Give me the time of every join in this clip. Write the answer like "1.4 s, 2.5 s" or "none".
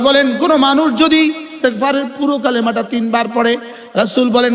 1.6 s